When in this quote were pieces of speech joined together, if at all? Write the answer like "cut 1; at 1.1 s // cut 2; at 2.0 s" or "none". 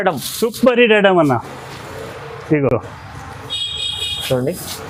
none